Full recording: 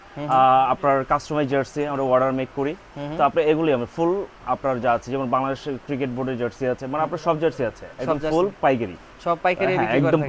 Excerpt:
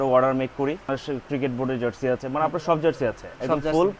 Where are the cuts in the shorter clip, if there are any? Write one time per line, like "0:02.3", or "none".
0:00.9

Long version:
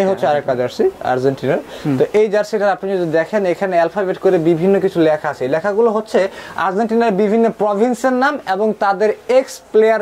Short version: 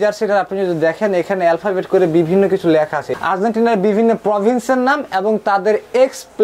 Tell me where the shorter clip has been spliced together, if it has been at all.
0:03.1

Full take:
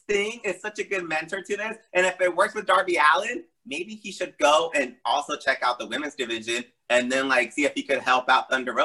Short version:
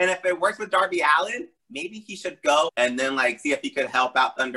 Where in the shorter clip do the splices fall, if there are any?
0:02.7

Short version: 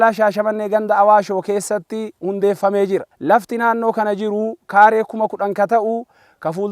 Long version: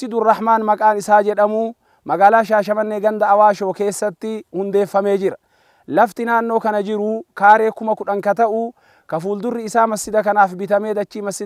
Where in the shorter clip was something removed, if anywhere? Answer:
0:03.1

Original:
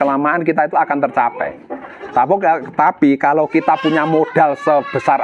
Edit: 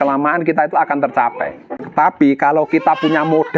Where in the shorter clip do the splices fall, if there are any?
0:01.8

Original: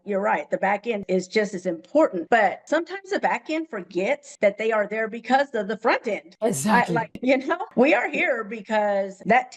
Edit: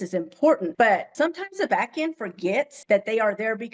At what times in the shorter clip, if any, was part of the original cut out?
none

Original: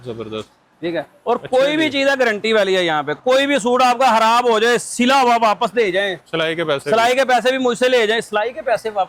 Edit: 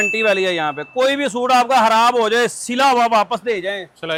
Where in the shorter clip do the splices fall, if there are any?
none

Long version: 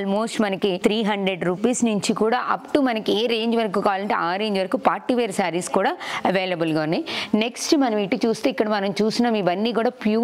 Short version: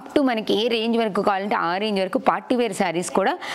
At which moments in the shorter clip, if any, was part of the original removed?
none

